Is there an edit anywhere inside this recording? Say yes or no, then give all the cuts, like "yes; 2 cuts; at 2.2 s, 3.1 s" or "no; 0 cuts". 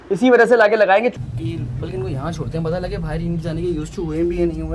yes; 1 cut; at 1.2 s